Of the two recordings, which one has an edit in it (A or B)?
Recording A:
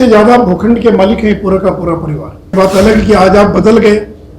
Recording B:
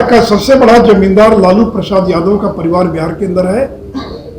A